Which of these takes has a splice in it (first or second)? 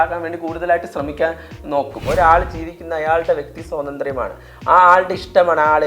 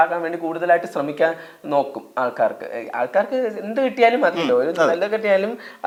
first